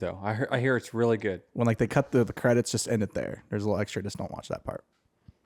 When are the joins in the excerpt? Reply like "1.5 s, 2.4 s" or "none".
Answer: none